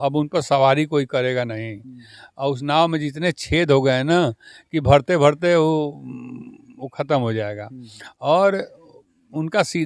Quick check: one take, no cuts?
yes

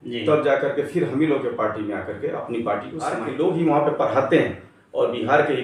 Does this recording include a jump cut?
yes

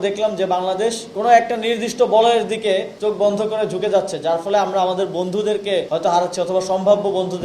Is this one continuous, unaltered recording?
no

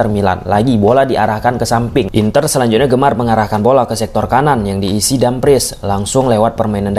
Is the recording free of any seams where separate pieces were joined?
no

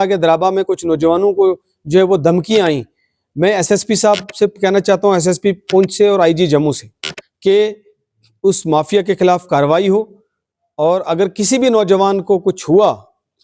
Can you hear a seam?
no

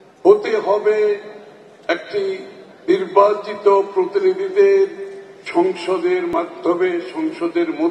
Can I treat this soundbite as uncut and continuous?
yes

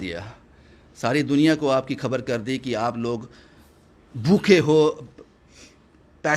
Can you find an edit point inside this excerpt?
no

